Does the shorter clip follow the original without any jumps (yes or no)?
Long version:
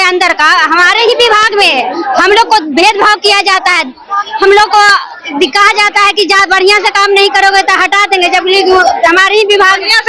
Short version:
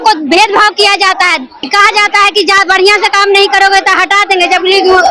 no